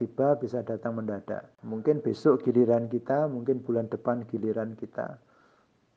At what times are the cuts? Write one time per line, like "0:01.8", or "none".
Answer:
0:01.5